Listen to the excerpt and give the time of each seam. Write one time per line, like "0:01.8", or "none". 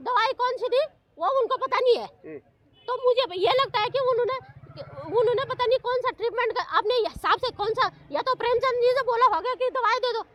none

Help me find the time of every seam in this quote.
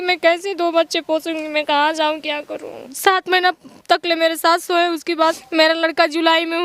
0:02.9
0:05.4

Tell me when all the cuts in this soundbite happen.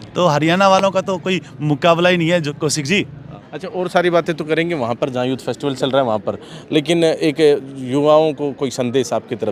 none

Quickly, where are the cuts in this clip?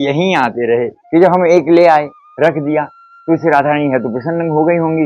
0:01.0

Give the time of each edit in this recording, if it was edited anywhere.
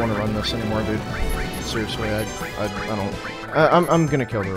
0:03.4

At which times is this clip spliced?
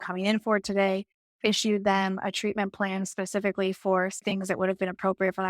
0:04.2

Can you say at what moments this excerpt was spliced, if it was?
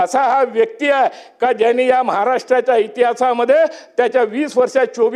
none

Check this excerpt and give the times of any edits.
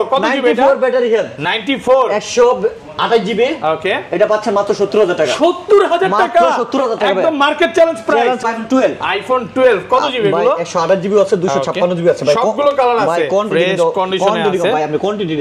0:08.4

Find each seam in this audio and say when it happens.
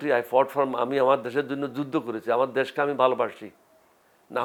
none

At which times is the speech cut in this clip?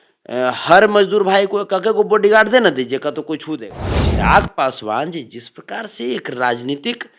0:03.6

